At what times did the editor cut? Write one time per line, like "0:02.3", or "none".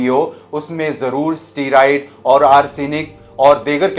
none